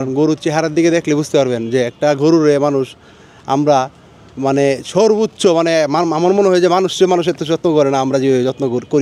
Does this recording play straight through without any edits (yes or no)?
yes